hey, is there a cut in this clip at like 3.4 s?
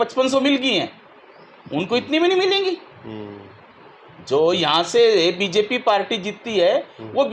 no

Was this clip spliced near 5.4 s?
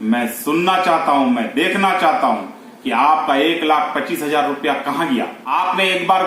yes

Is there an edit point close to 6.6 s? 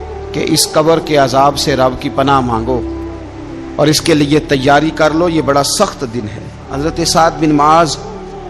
yes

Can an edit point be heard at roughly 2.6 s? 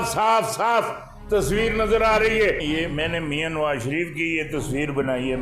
yes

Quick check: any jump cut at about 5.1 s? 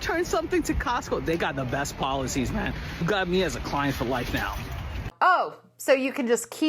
yes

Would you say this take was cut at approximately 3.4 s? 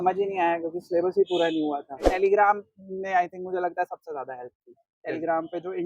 no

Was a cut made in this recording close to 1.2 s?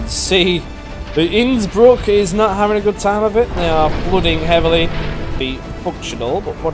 no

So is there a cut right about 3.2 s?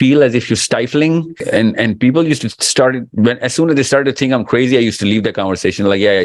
no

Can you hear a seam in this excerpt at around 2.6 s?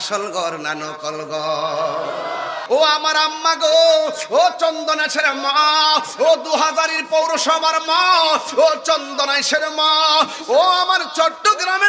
yes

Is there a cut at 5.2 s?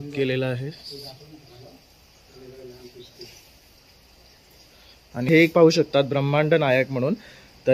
yes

